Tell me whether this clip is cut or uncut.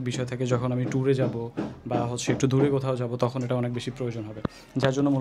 uncut